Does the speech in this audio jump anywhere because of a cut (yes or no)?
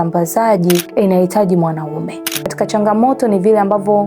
yes